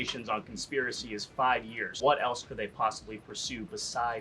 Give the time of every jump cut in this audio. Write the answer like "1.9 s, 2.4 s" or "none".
2.0 s